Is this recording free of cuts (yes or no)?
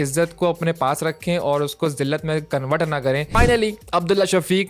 no